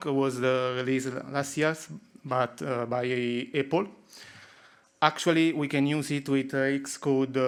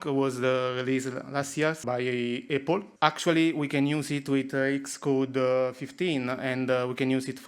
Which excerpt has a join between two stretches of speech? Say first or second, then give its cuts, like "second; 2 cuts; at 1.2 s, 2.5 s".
second; 2 cuts; at 1.8 s, 2.9 s